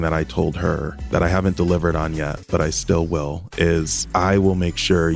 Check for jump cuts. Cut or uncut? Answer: cut